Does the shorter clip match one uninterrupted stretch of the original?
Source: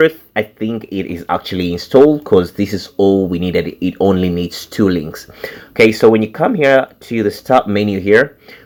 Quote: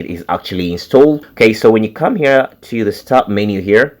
no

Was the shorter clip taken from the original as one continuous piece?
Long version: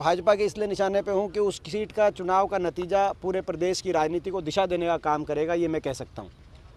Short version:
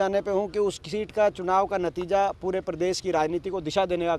yes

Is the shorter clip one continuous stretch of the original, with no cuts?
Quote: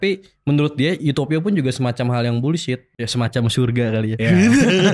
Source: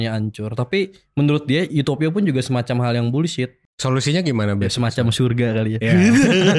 no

